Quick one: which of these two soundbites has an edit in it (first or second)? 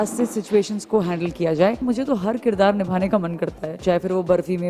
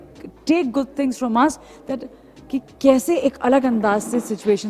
first